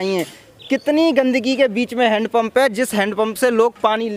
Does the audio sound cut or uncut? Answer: uncut